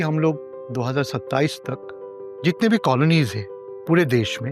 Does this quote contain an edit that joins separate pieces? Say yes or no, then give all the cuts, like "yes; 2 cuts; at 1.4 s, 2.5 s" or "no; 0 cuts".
no; 0 cuts